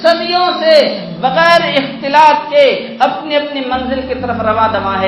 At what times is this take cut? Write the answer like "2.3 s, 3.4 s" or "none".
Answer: none